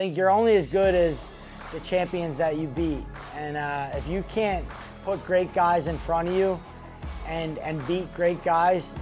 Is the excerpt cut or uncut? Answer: uncut